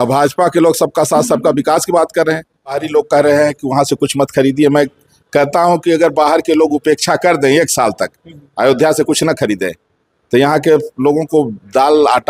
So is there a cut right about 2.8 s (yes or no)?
yes